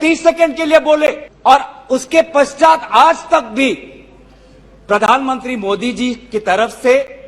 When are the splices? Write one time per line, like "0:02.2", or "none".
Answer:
0:01.3